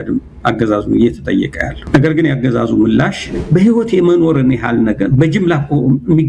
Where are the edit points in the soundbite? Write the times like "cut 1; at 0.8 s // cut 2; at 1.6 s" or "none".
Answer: cut 1; at 1.7 s // cut 2; at 3.3 s